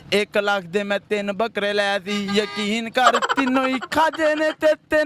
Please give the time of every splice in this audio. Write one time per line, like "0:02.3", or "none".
none